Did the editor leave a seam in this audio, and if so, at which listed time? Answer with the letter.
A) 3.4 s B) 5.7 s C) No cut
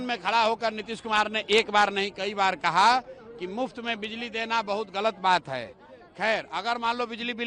C